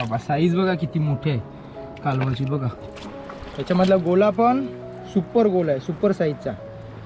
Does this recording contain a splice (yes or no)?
yes